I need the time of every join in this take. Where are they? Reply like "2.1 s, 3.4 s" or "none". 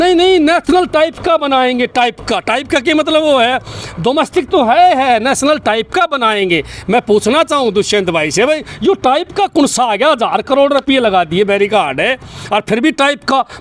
none